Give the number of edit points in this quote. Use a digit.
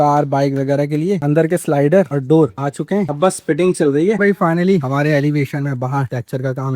3